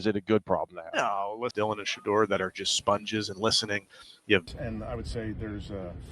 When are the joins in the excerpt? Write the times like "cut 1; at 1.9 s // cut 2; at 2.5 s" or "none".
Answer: cut 1; at 1.5 s // cut 2; at 4.4 s

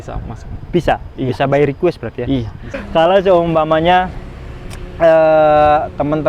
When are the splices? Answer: cut 1; at 2.7 s

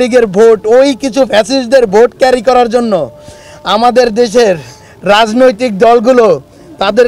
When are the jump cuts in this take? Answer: none

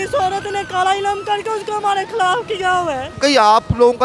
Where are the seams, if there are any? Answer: cut 1; at 3.1 s

